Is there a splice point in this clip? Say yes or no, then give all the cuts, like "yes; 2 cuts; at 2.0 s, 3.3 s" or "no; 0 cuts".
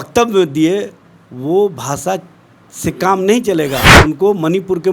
yes; 1 cut; at 3.9 s